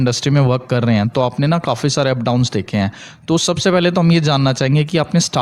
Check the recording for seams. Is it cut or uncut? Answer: uncut